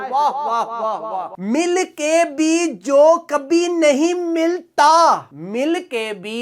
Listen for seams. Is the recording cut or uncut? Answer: uncut